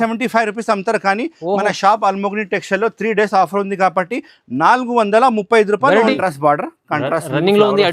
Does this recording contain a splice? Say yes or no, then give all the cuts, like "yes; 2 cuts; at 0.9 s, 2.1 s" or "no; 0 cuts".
yes; 1 cut; at 6.2 s